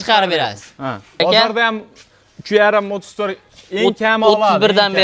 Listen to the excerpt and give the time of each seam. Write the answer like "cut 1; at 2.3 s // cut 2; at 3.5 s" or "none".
cut 1; at 1.2 s